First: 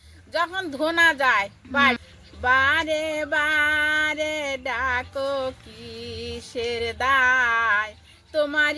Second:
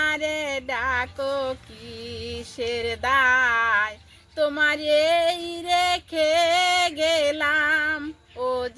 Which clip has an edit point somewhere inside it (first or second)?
first